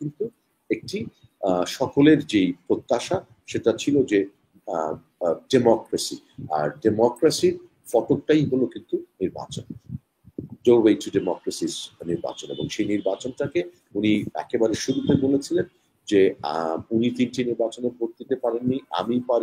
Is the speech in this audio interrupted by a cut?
no; 0 cuts

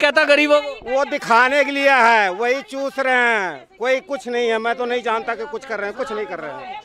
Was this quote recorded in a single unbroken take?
yes; 0 cuts

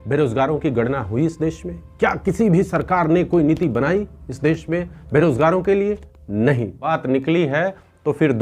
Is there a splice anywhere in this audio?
yes; 1 cut; at 6.9 s

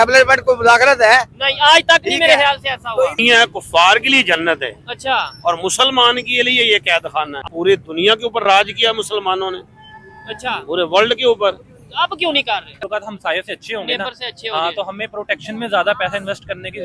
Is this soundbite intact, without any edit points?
no; 3 cuts; at 3.1 s, 7.4 s, 12.8 s

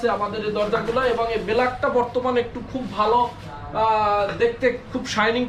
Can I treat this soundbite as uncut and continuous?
yes; 0 cuts

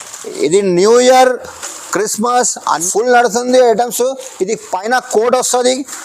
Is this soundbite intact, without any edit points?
no; 1 cut; at 2.8 s

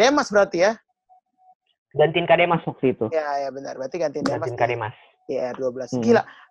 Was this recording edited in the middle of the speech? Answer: no; 0 cuts

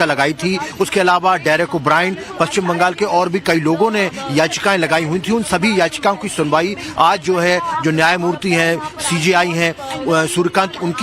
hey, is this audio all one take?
no; 1 cut; at 6.3 s

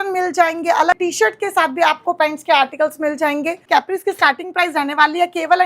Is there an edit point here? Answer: yes; 2 cuts; at 1.0 s, 3.6 s

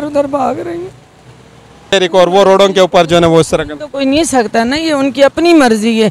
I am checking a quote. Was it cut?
yes; 1 cut; at 1.9 s

